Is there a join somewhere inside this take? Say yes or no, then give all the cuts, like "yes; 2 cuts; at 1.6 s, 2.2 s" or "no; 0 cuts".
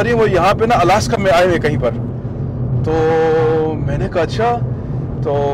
no; 0 cuts